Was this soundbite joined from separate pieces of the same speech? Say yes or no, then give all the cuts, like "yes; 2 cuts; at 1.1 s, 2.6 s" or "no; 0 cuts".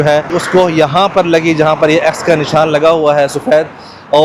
no; 0 cuts